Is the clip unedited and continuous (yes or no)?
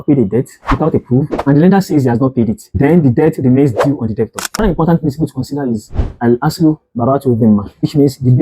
no